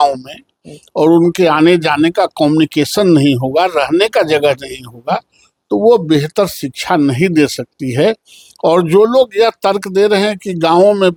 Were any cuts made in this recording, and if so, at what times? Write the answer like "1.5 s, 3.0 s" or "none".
none

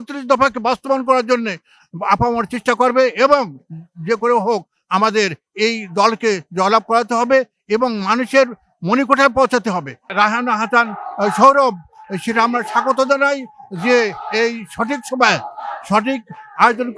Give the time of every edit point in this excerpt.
10.1 s

